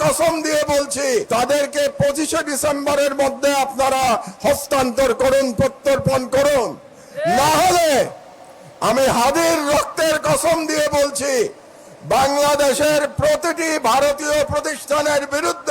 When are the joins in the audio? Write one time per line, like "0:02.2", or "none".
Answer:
0:01.3